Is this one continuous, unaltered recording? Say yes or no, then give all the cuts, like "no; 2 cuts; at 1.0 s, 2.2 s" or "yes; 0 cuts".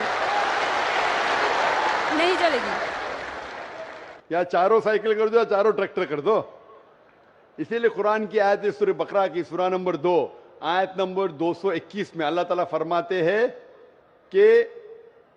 no; 1 cut; at 11.6 s